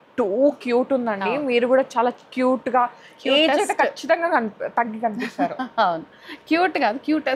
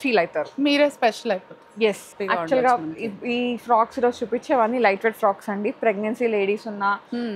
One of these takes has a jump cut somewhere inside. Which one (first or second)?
second